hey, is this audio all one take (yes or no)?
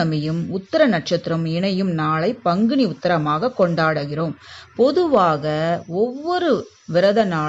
yes